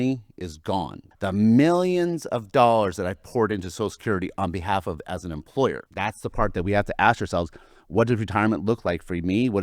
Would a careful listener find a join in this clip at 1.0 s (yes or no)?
yes